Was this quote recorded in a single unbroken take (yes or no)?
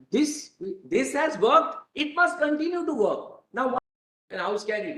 no